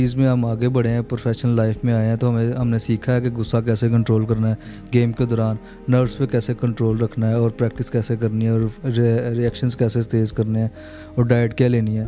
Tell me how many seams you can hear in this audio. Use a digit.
0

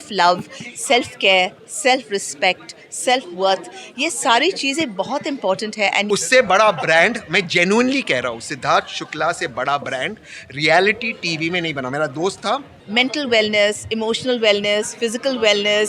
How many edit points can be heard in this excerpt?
2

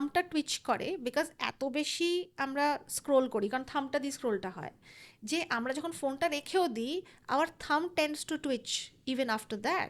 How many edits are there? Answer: 0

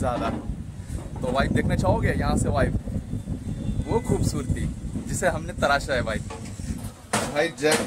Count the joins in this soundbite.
1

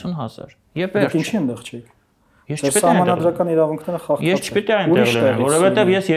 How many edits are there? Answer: 0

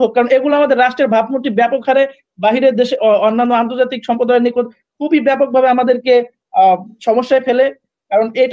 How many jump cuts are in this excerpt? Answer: 0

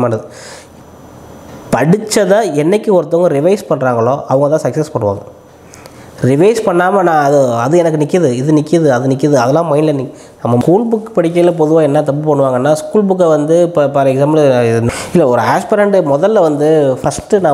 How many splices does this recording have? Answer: 2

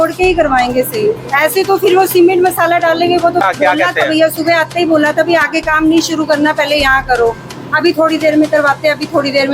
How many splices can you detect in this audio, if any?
1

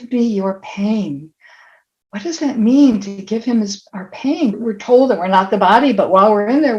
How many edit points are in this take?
1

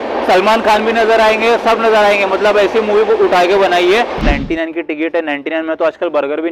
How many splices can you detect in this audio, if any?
1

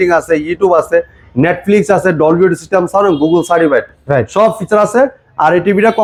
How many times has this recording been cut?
0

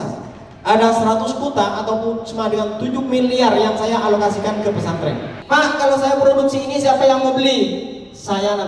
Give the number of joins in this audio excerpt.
1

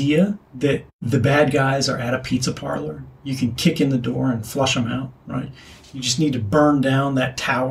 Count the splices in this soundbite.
1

